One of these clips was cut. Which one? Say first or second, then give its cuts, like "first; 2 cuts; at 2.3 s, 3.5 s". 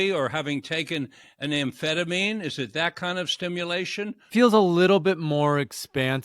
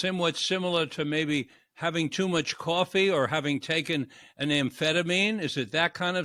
first; 1 cut; at 4.3 s